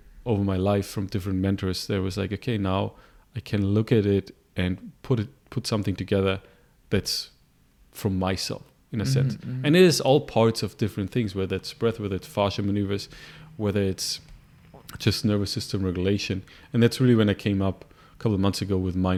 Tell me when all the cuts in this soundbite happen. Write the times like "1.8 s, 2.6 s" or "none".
none

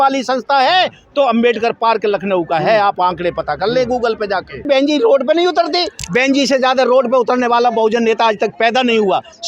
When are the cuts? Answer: 4.6 s

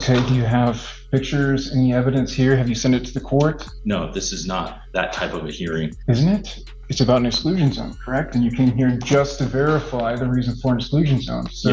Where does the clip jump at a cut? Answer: 0.9 s, 3.7 s, 6.0 s

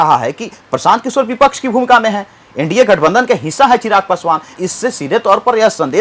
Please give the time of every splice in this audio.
4.5 s

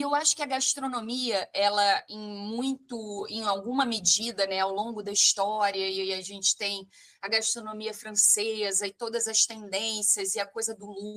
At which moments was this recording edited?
none

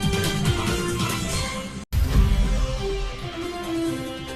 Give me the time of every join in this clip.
2.0 s

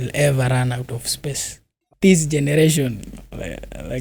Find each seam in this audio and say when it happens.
1.8 s

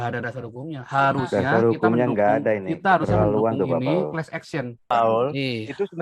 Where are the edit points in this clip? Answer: 4.9 s

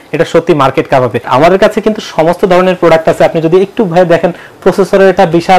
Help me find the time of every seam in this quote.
1.3 s

